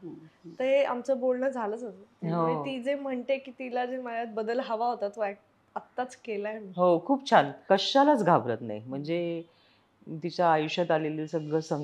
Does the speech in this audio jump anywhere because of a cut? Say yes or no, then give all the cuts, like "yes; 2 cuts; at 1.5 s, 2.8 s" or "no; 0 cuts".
yes; 1 cut; at 7.6 s